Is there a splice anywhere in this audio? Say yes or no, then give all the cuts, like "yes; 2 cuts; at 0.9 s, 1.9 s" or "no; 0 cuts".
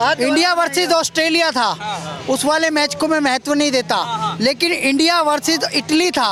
no; 0 cuts